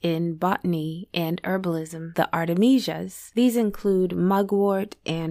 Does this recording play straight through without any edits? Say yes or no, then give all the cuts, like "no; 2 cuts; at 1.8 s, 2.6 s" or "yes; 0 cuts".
no; 1 cut; at 2.1 s